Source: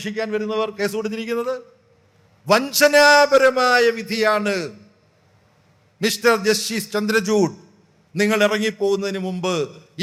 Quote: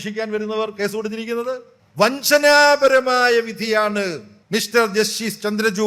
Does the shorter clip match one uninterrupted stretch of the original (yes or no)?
no